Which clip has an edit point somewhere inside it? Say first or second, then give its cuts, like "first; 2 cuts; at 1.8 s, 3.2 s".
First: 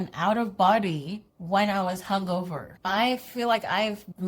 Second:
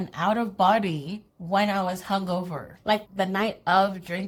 first; 1 cut; at 2.7 s